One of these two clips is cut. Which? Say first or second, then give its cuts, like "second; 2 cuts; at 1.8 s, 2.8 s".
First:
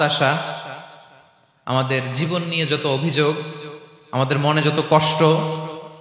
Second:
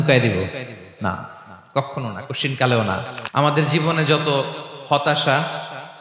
second; 1 cut; at 3.2 s